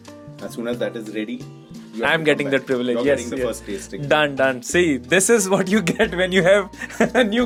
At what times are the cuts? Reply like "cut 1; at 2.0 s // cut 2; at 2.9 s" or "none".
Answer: none